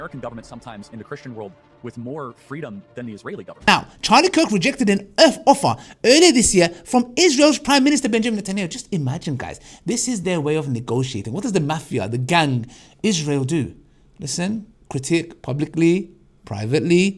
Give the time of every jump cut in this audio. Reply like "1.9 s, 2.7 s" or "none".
3.7 s, 14.8 s